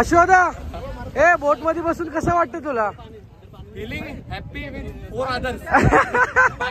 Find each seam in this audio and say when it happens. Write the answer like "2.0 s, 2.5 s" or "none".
none